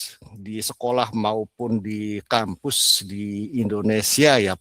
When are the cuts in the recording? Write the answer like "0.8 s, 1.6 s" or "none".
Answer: none